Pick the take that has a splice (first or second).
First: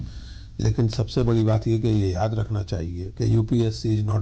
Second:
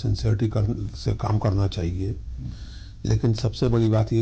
first